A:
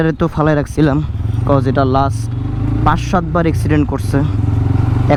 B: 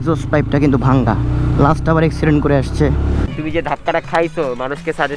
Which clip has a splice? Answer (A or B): B